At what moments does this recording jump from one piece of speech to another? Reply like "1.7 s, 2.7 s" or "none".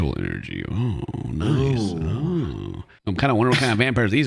none